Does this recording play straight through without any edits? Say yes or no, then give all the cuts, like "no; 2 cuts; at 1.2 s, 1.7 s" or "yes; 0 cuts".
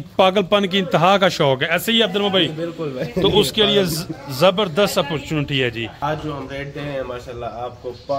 no; 1 cut; at 6.0 s